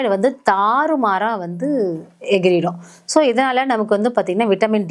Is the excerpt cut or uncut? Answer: uncut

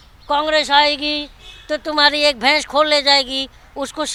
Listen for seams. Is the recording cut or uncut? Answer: uncut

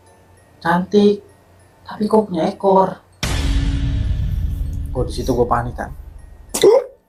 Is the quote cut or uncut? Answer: uncut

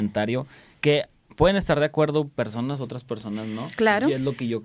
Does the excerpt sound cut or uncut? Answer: uncut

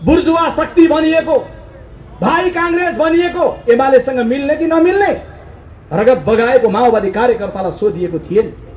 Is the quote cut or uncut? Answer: uncut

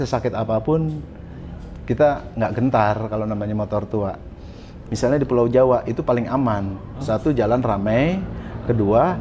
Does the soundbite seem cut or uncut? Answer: uncut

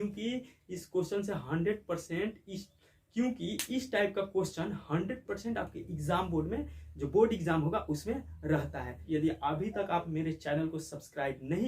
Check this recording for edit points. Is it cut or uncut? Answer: cut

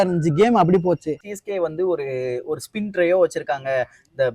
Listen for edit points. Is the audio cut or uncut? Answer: cut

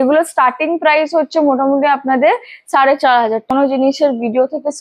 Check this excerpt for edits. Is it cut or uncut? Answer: cut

